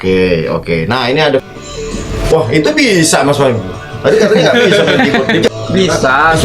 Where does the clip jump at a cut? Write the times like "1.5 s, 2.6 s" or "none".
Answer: 1.4 s, 5.5 s